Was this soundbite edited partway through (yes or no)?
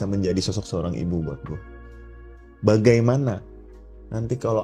no